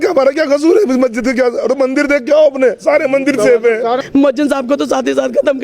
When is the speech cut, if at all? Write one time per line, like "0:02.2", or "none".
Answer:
0:04.0